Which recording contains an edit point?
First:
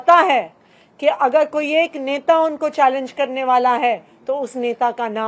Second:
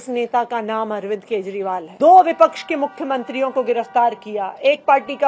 second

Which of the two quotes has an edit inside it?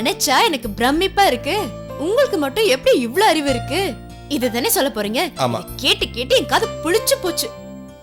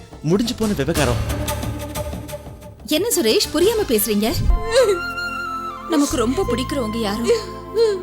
second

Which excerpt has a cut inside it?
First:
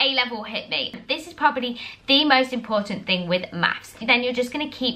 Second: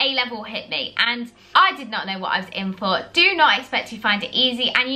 first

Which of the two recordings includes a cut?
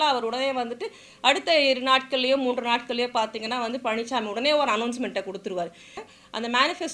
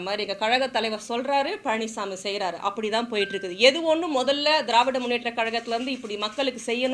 first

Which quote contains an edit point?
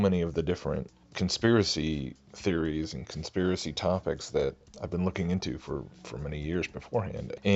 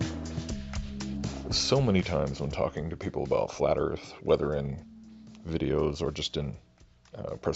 first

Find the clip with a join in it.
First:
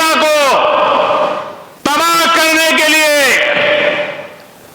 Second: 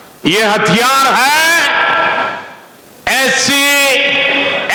first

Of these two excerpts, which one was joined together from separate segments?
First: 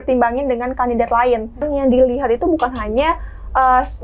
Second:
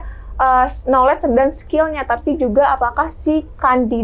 first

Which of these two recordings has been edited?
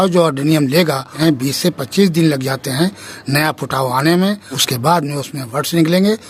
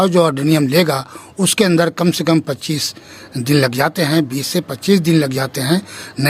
first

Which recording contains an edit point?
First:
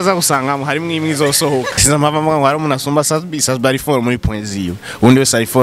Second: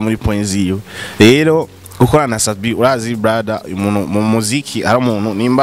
first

